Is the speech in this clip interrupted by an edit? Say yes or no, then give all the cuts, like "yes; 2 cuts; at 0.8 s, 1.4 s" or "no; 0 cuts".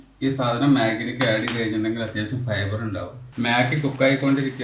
yes; 1 cut; at 3.2 s